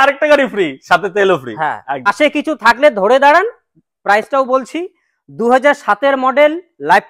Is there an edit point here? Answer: yes; 1 cut; at 2.1 s

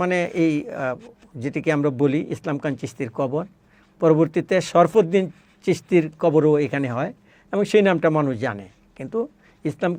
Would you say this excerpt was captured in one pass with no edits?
yes; 0 cuts

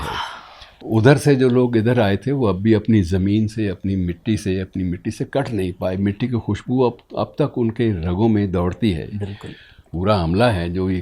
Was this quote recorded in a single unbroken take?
no; 2 cuts; at 0.8 s, 9.9 s

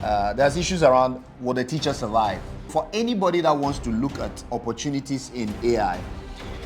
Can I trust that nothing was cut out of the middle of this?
no; 1 cut; at 2.7 s

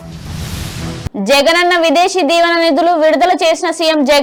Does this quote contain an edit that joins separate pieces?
no; 0 cuts

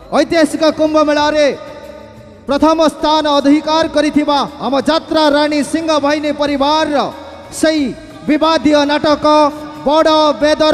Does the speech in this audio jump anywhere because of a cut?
no; 0 cuts

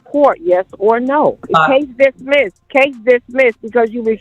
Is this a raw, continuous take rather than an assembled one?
no; 2 cuts; at 1.4 s, 2.6 s

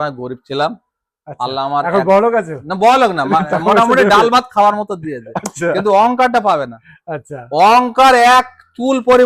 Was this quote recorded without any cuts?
yes; 0 cuts

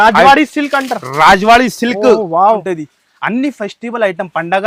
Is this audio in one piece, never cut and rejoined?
no; 1 cut; at 2.4 s

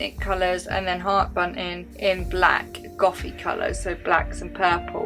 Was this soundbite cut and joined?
no; 0 cuts

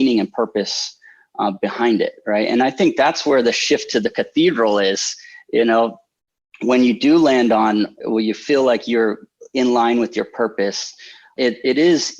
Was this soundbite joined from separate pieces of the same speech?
yes; 2 cuts; at 8.0 s, 11.3 s

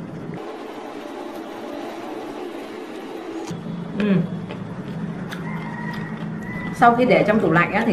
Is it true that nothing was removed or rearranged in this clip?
no; 1 cut; at 6.8 s

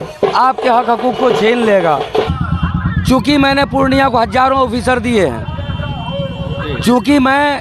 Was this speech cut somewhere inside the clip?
yes; 1 cut; at 2.1 s

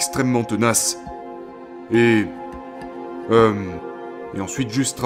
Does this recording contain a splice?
no; 0 cuts

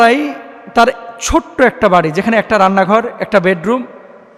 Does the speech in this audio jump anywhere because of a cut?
no; 0 cuts

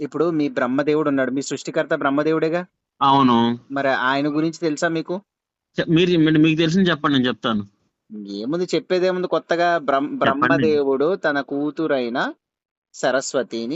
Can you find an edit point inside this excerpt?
no; 0 cuts

